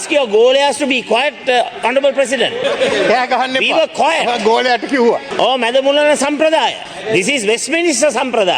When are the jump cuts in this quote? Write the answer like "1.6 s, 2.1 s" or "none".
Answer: 2.6 s, 5.3 s, 6.9 s